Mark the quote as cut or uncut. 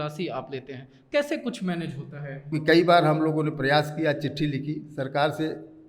cut